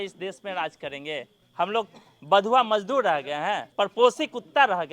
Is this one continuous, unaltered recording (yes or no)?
no